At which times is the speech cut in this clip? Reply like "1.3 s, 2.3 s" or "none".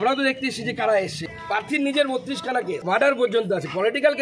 1.4 s, 2.8 s